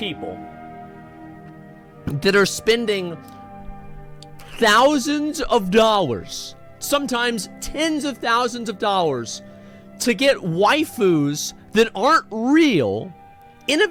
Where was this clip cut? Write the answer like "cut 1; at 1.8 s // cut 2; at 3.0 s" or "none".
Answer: none